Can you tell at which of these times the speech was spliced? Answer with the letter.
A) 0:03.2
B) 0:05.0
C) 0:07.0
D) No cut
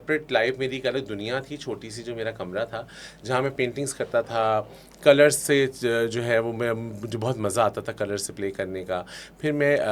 D